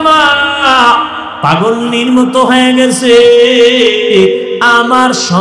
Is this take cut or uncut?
uncut